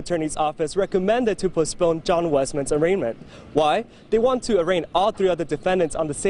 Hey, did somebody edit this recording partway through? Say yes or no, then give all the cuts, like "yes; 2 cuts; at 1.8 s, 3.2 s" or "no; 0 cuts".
no; 0 cuts